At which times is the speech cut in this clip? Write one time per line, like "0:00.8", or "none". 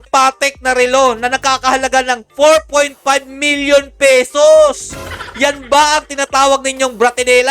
none